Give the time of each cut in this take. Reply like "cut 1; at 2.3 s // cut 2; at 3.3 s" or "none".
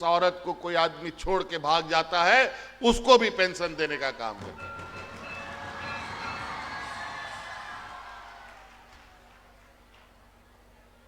none